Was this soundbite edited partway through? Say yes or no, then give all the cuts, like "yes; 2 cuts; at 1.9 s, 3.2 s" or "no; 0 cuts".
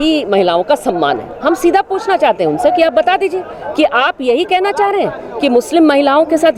no; 0 cuts